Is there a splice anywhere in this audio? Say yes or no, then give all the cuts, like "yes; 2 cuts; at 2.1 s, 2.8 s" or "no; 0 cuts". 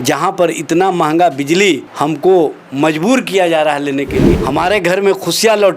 yes; 2 cuts; at 1.9 s, 4.3 s